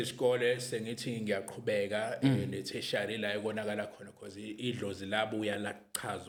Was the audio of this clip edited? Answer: no; 0 cuts

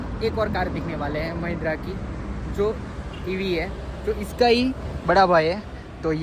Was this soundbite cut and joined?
no; 0 cuts

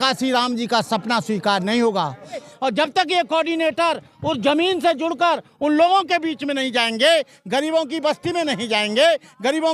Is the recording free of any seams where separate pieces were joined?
no; 1 cut; at 2.5 s

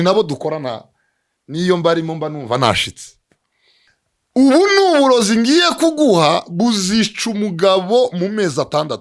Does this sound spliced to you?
yes; 1 cut; at 3.9 s

